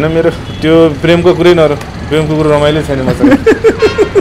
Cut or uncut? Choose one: uncut